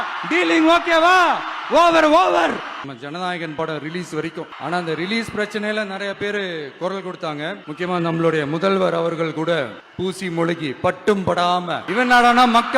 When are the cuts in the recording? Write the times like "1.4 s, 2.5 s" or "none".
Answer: 2.8 s, 4.5 s, 7.6 s, 9.8 s, 11.8 s